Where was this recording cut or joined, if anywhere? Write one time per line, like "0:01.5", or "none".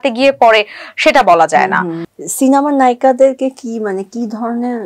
0:02.0